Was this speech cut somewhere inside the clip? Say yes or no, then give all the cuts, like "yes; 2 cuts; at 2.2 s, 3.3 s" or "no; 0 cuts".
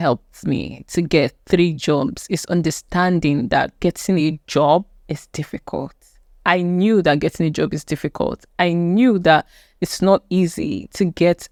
no; 0 cuts